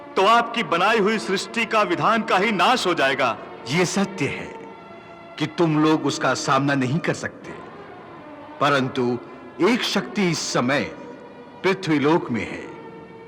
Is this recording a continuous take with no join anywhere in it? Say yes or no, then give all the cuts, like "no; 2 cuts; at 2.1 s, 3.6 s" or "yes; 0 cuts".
no; 1 cut; at 3.5 s